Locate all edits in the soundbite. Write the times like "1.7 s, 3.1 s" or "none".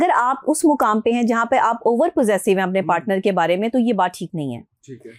none